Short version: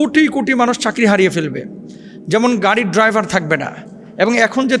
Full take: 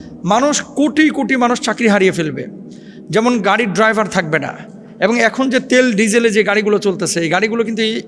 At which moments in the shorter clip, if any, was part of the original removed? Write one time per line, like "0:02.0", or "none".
none

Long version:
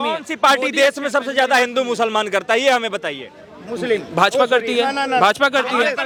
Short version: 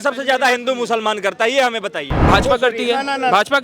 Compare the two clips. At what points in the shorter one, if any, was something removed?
0:02.2

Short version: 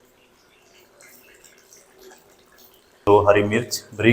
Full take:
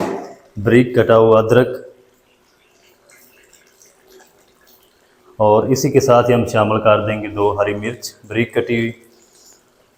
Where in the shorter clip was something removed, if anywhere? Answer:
0:03.0

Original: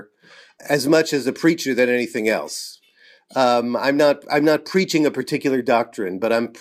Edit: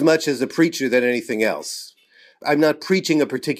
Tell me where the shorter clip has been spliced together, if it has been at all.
0:02.4

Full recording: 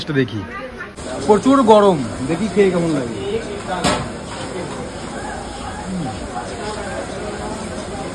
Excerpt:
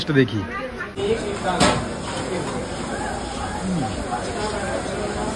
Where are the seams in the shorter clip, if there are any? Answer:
0:00.9

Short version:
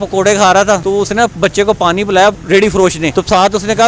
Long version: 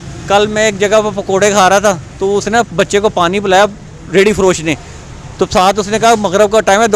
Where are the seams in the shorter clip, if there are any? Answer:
0:00.8
0:02.6

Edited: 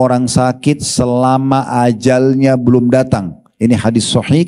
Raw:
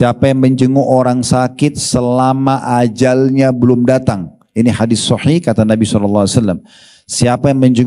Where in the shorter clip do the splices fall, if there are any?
none

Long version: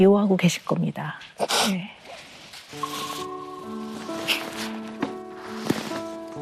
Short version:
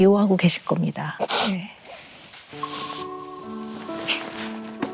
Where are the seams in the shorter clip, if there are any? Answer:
0:01.1

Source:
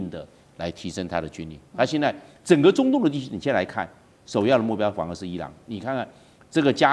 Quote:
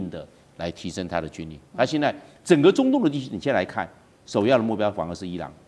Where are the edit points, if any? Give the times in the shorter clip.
none

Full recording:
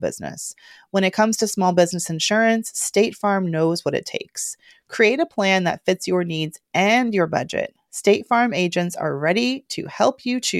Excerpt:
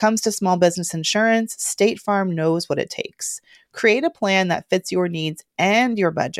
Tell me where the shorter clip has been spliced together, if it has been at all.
none

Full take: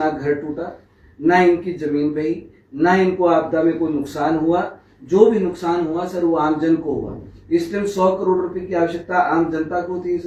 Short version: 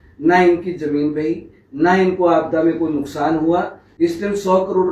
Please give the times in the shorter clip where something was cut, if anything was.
0:03.8

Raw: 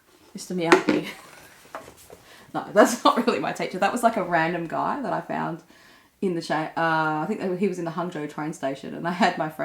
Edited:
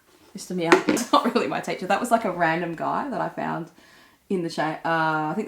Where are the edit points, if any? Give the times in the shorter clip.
0:01.0

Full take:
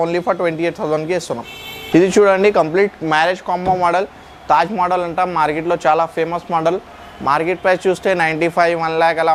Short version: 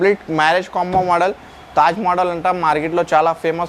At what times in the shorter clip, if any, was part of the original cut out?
none

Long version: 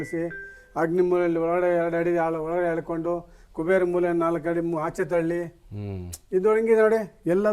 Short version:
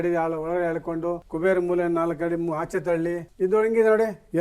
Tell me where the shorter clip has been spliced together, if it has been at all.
0:01.3
0:03.3

